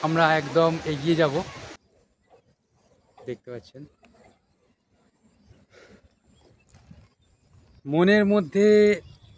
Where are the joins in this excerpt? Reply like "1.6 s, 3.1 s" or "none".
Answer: 1.6 s